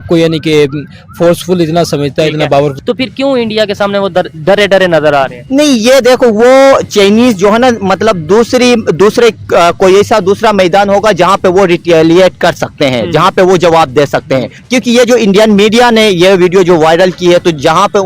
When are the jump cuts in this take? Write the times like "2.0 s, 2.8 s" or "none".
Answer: 2.7 s, 14.6 s